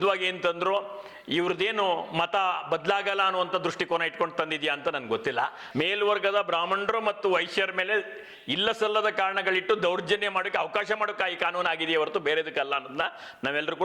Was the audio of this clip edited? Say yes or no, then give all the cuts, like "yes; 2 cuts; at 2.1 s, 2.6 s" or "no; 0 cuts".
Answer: yes; 1 cut; at 5.6 s